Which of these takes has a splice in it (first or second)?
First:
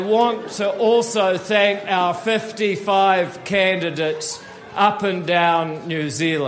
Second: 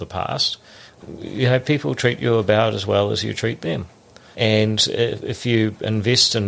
second